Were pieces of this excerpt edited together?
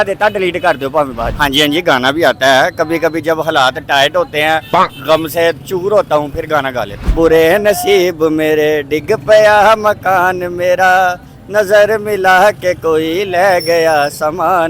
yes; 2 cuts; at 1.3 s, 7.0 s

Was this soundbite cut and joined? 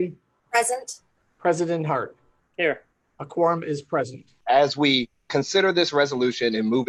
no; 0 cuts

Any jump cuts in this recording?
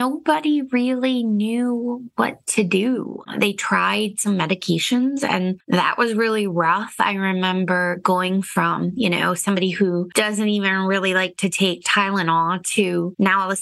no; 0 cuts

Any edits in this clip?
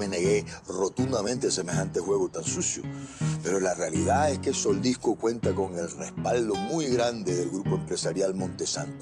yes; 1 cut; at 3.4 s

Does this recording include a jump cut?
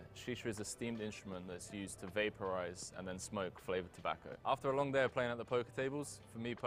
no; 0 cuts

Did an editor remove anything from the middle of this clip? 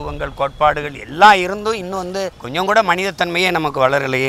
yes; 1 cut; at 2.4 s

